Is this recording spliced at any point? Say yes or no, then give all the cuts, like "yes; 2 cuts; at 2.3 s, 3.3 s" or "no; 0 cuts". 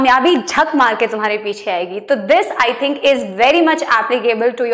no; 0 cuts